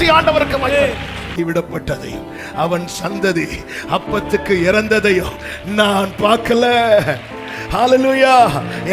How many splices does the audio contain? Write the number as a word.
one